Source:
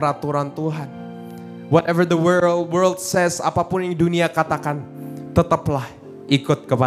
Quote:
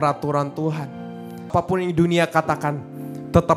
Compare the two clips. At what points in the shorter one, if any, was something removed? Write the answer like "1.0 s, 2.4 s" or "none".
1.5 s

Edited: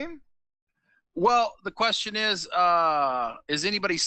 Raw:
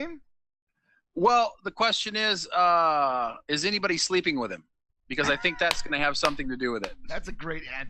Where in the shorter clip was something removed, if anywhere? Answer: none

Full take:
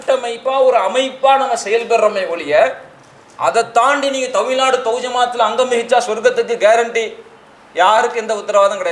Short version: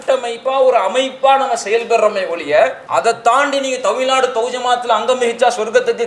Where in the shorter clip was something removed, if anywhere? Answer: 2.8 s

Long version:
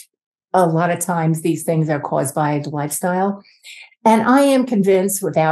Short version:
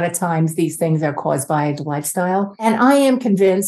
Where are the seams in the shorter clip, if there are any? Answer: 2.6 s

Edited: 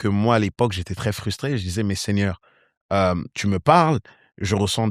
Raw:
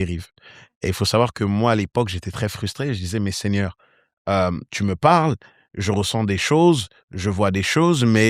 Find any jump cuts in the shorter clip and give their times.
none

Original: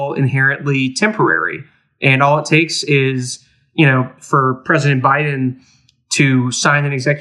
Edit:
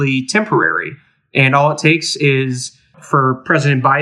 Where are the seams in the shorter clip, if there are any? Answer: 3.0 s

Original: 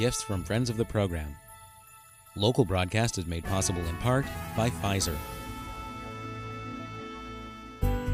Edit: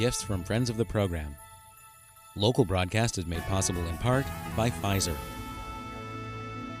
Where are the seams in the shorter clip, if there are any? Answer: 5.2 s

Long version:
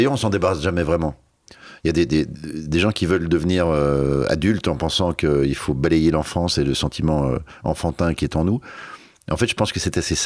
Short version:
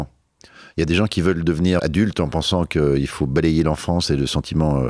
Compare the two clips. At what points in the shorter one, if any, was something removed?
0.9 s, 1.8 s

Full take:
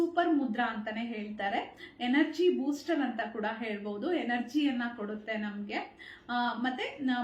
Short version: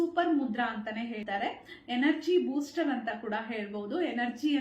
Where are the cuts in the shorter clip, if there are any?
1.2 s

